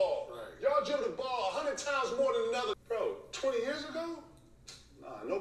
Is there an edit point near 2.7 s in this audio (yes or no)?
yes